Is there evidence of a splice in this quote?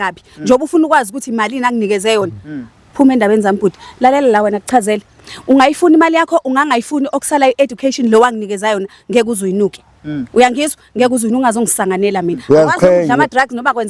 no; 0 cuts

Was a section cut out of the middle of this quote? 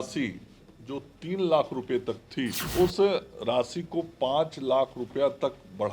yes; 1 cut; at 2.6 s

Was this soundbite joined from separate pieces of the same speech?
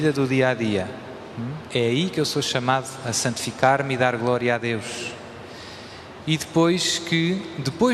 no; 0 cuts

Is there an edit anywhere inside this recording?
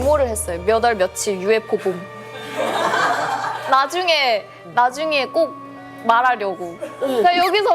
no; 0 cuts

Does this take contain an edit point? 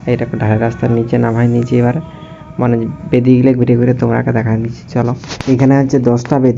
no; 0 cuts

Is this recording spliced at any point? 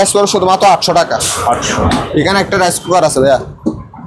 no; 0 cuts

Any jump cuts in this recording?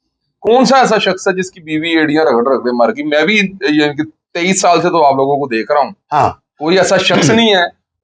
no; 0 cuts

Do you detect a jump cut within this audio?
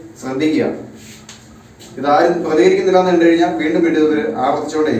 no; 0 cuts

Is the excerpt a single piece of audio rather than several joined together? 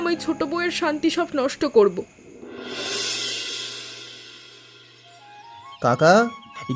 yes; 0 cuts

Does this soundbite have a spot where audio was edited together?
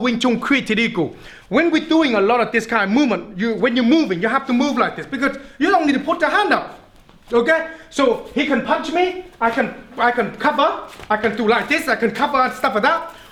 no; 0 cuts

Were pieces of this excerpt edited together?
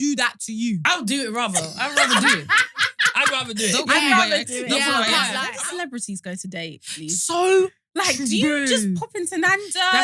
yes; 2 cuts; at 0.8 s, 5.5 s

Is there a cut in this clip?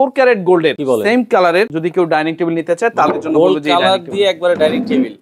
yes; 2 cuts; at 0.8 s, 1.7 s

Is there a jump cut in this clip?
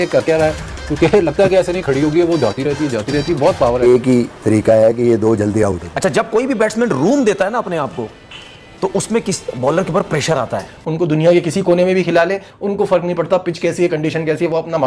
yes; 3 cuts; at 3.8 s, 5.8 s, 10.8 s

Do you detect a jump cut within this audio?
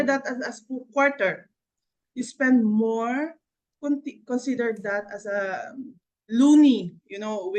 no; 0 cuts

